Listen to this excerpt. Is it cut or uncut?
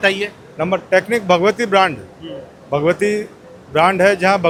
uncut